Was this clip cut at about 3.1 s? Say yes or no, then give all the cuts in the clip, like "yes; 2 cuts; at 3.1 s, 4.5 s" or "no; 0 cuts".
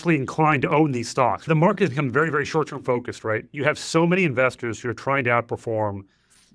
no; 1 cut; at 1.5 s